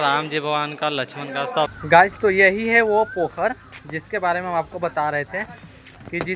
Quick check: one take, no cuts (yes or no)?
no